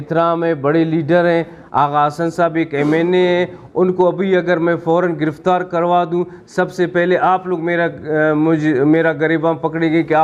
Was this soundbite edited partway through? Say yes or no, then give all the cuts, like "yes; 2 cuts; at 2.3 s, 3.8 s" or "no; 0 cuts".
no; 0 cuts